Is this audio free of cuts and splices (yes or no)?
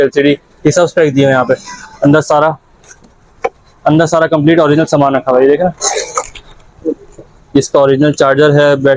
yes